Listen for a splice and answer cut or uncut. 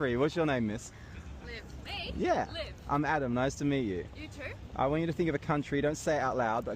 cut